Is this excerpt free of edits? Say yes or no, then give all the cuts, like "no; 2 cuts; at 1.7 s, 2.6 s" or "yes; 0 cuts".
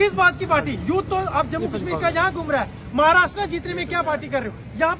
yes; 0 cuts